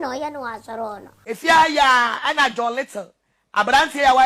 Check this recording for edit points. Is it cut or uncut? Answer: cut